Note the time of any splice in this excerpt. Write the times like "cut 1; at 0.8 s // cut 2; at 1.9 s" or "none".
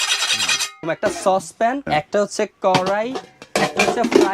cut 1; at 0.8 s // cut 2; at 1.8 s